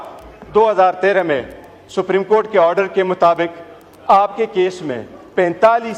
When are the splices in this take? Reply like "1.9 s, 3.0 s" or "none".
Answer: none